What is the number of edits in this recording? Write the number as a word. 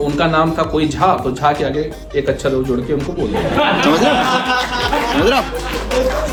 zero